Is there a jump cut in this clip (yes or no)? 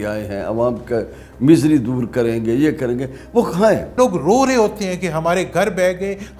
yes